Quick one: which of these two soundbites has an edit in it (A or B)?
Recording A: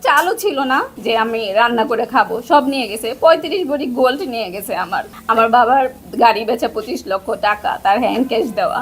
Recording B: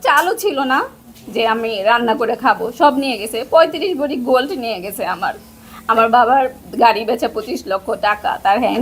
A